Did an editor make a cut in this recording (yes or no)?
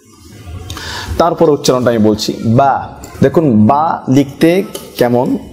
yes